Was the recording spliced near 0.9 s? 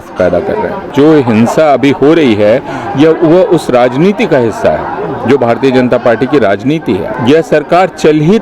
yes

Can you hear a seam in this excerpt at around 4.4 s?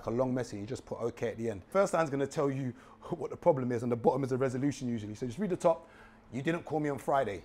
no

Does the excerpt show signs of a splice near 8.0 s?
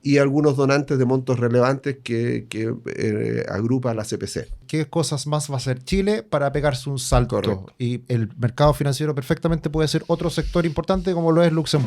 no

